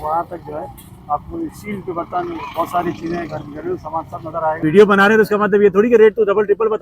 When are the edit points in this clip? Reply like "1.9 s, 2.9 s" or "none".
4.6 s